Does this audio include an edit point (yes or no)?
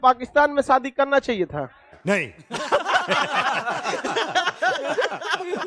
no